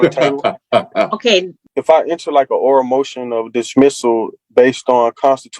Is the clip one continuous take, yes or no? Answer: no